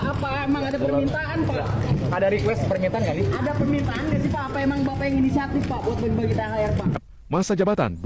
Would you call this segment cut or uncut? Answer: cut